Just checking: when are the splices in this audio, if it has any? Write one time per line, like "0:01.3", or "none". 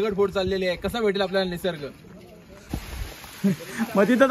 0:02.7